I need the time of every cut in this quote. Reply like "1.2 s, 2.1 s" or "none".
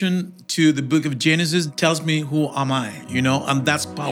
1.7 s, 3.0 s